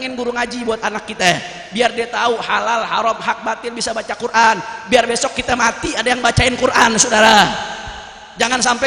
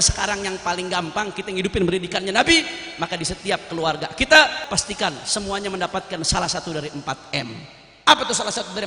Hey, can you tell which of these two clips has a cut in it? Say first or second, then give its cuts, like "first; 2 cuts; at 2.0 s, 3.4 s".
second; 1 cut; at 4.6 s